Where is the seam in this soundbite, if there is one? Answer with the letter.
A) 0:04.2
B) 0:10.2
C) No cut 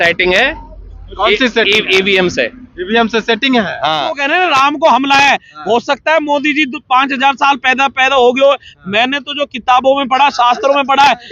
A